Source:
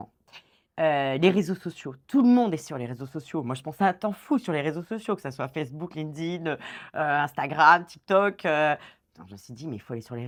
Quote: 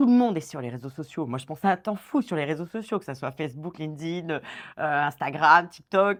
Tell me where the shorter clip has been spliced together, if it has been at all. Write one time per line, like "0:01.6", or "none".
none